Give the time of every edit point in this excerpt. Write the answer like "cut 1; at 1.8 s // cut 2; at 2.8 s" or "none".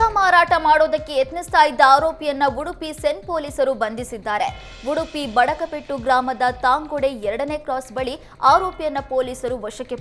none